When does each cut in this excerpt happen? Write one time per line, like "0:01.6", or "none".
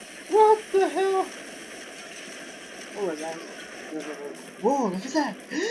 0:03.9